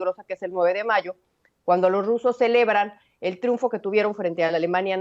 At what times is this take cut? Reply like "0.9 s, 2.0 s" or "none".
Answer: none